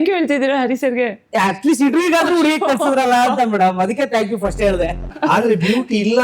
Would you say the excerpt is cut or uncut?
cut